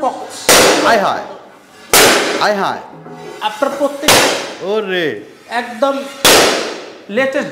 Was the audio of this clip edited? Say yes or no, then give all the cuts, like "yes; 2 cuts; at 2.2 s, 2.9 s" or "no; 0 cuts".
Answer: no; 0 cuts